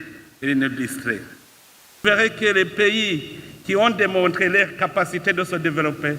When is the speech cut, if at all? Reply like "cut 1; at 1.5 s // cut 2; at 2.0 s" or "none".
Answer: cut 1; at 2.0 s